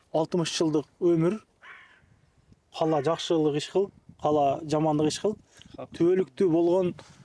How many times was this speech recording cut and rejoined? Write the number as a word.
zero